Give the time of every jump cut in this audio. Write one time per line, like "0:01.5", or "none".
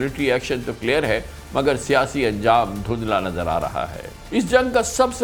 none